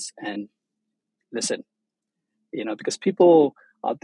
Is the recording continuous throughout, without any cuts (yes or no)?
yes